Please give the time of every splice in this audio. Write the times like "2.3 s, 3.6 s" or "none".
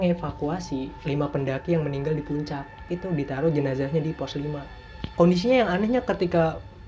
0.9 s, 2.8 s, 5.0 s